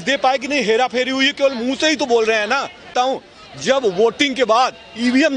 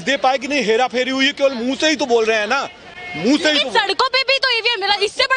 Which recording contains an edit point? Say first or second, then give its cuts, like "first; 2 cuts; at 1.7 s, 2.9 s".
first; 1 cut; at 2.9 s